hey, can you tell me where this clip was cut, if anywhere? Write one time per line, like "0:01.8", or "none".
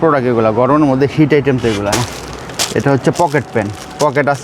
0:01.9